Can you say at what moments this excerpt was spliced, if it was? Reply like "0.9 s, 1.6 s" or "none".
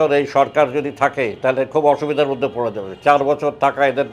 none